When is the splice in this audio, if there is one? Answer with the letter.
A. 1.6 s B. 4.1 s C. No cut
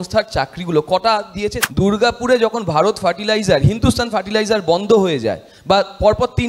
A